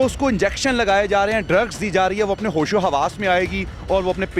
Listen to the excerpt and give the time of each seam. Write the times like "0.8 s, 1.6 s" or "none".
none